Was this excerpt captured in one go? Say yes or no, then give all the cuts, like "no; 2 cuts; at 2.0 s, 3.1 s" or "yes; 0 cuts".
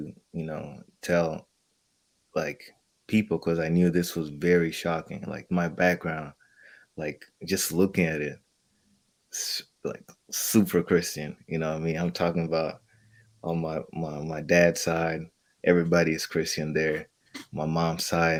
yes; 0 cuts